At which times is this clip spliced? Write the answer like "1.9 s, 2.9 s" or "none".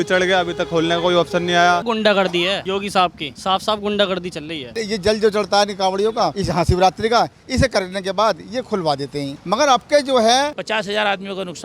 1.8 s, 4.8 s, 10.5 s